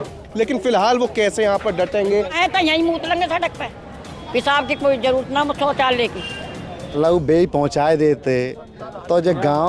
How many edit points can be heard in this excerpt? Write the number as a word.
two